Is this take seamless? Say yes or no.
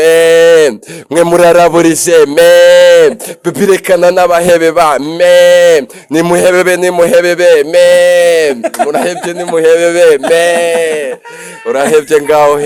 yes